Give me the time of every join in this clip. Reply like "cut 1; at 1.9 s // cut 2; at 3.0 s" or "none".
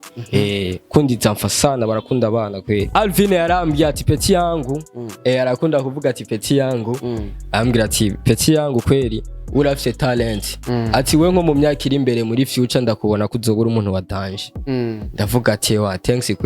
cut 1; at 3.0 s